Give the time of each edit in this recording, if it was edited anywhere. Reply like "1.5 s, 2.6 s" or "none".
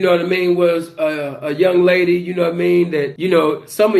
none